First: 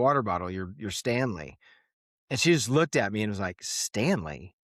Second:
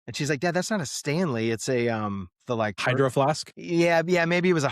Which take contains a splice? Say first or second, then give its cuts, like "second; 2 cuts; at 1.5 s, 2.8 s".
second; 2 cuts; at 2.8 s, 3.5 s